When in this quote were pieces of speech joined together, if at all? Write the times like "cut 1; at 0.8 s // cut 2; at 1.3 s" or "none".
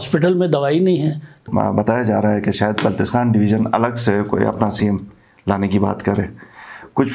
cut 1; at 1.5 s